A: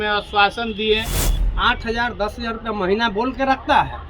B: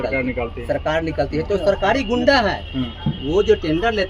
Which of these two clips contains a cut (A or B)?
A